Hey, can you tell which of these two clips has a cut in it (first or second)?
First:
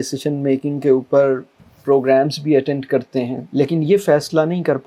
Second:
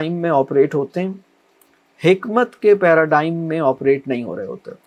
first